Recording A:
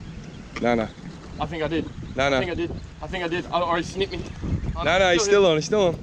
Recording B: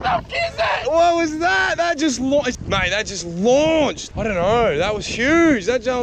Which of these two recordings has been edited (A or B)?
B